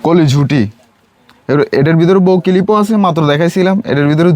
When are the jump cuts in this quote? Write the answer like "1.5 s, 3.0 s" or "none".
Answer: none